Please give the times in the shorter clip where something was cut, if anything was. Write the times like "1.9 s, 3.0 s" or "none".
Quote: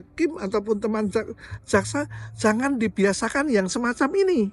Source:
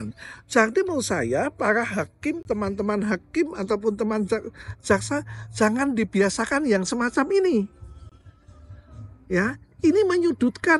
none